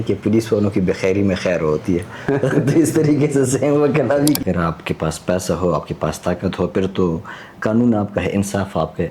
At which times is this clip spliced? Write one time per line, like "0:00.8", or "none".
0:04.4